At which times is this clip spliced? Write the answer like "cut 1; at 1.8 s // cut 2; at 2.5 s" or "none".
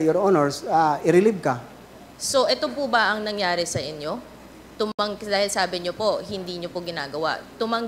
none